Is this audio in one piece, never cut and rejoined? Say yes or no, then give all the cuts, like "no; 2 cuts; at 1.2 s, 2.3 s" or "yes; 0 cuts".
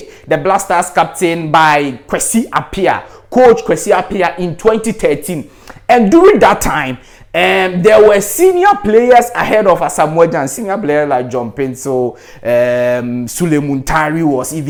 yes; 0 cuts